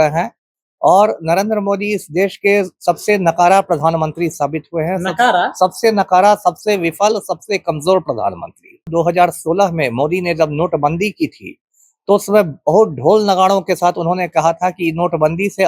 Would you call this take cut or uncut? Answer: cut